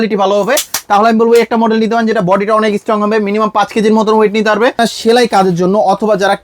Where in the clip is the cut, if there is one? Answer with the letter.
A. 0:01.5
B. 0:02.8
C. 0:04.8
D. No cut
C